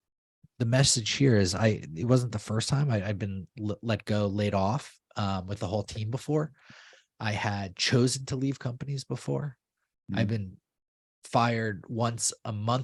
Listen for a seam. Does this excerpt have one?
no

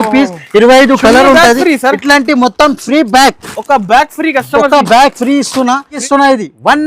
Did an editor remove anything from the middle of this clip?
yes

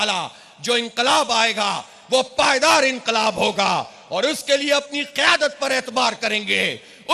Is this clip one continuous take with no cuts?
yes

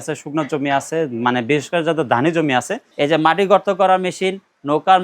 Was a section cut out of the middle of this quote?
yes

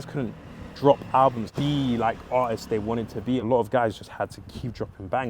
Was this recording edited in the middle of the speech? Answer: yes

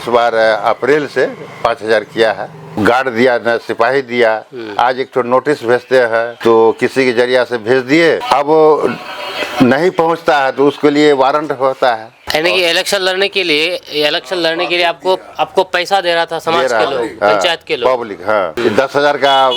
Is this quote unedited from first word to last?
no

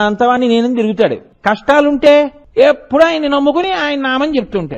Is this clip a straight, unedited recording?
no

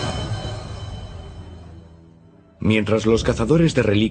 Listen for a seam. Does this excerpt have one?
no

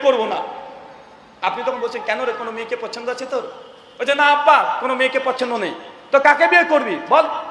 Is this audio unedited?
yes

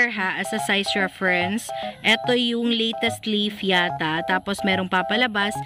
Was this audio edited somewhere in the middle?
no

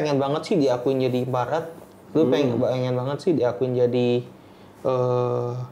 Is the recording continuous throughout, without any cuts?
yes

